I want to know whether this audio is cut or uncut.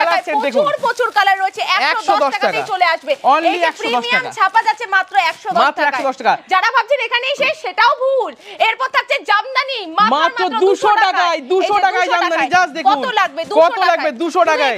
uncut